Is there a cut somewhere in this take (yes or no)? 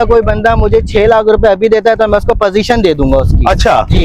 no